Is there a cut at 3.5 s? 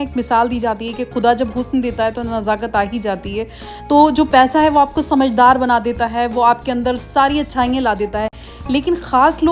no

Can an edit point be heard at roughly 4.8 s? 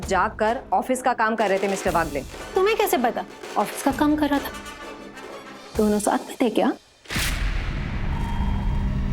no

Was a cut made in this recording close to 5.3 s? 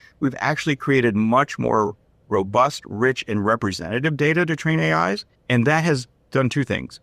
yes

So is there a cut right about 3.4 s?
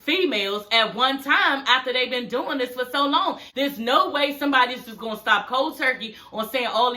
yes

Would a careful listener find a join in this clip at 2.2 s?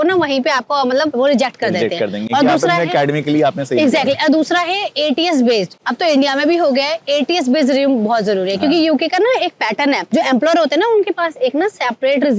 no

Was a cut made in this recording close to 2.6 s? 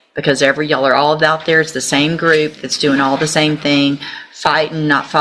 no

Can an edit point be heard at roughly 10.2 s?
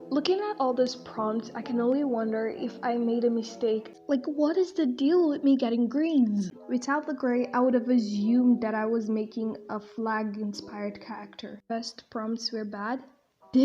no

